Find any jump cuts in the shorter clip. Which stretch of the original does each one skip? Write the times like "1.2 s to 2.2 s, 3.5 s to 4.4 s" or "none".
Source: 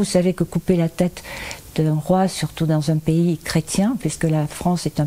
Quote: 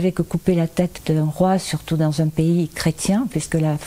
1.2 s to 1.7 s